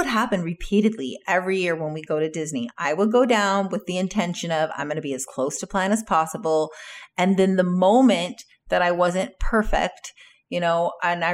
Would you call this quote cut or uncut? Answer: uncut